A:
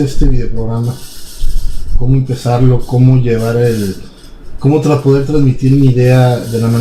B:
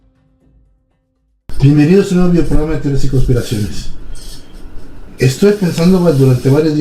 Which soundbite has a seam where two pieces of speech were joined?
A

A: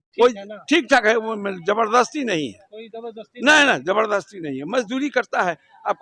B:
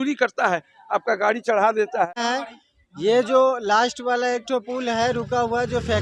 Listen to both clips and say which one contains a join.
B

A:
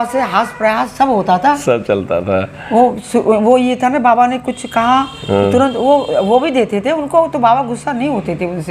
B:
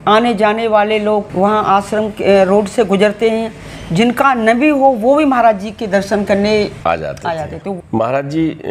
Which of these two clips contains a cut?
B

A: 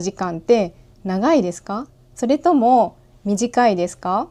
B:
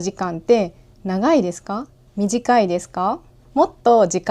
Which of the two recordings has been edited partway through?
B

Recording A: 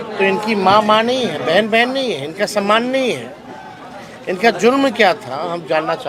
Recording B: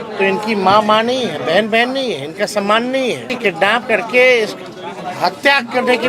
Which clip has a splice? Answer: B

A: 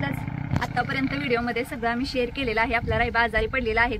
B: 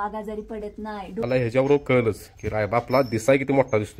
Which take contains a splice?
B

